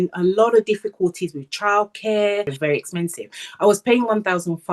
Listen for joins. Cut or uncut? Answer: cut